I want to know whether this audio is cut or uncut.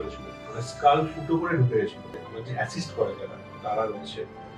cut